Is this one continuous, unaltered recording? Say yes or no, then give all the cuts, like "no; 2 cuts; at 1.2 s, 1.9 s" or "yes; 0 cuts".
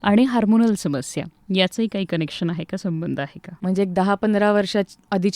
no; 1 cut; at 3.5 s